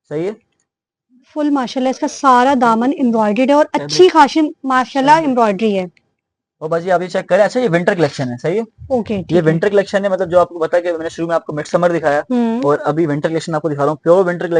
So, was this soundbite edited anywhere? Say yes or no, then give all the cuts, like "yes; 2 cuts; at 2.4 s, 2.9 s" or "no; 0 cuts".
no; 0 cuts